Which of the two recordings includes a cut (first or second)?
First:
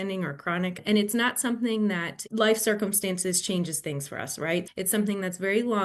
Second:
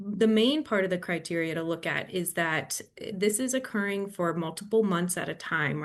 first